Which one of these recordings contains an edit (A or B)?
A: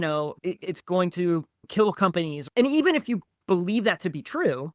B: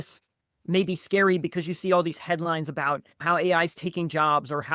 A